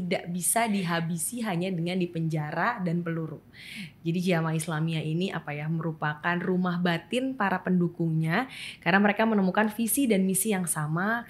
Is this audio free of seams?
yes; 0 cuts

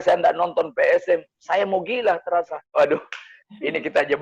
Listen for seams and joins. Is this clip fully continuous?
no; 1 cut; at 2.6 s

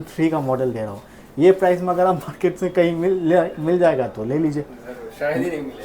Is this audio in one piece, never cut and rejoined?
yes; 0 cuts

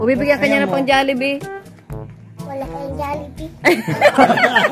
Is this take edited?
no; 0 cuts

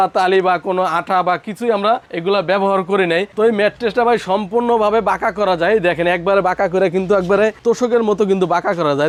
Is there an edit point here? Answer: no; 0 cuts

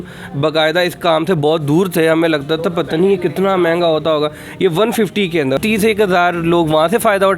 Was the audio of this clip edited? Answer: yes; 1 cut; at 5.6 s

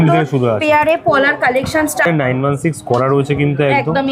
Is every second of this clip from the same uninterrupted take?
no; 1 cut; at 2.1 s

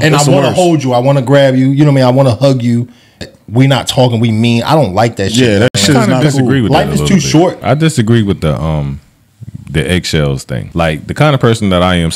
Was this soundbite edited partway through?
yes; 3 cuts; at 3.2 s, 7.6 s, 10.6 s

